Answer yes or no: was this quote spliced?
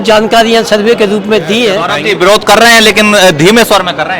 yes